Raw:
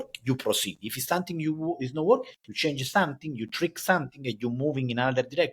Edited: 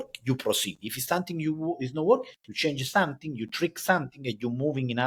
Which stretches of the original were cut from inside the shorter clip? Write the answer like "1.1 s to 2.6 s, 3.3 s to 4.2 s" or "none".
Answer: none